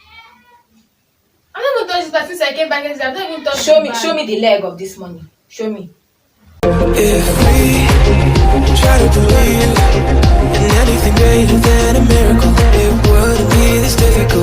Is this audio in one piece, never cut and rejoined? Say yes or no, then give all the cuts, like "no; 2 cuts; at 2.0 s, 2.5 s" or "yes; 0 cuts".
no; 1 cut; at 6.6 s